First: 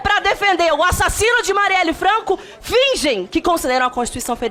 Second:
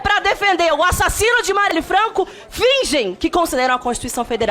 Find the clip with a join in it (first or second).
second